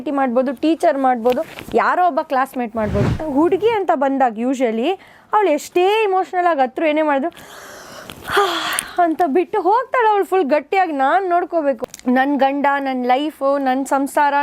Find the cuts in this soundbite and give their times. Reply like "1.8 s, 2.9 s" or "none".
3.2 s, 11.8 s